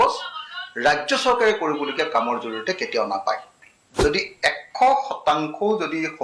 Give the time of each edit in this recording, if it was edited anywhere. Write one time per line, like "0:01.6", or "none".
0:03.8